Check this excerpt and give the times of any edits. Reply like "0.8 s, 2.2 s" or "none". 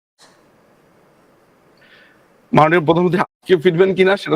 none

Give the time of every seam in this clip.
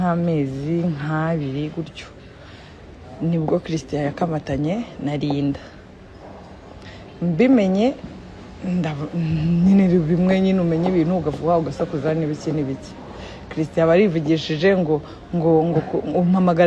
none

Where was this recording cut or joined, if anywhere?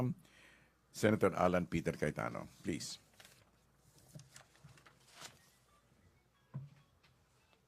none

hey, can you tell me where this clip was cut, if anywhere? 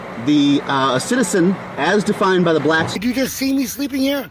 2.9 s

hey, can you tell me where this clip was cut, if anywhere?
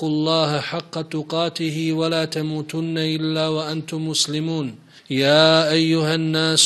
4.9 s

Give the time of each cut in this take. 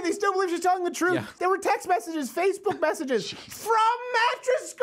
1.4 s

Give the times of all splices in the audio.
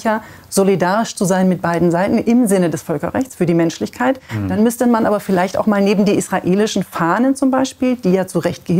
none

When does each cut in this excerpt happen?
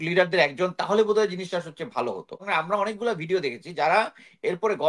2.4 s

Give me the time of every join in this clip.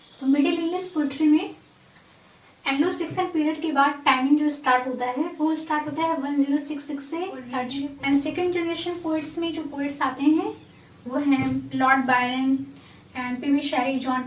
7.6 s

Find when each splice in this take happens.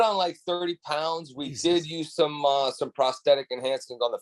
none

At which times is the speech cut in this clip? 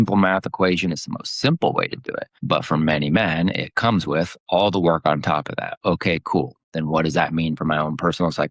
2.3 s

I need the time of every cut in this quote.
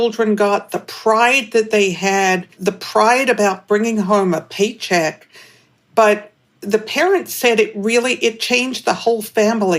2.5 s

